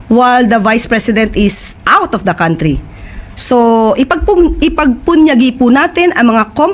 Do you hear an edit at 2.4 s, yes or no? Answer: no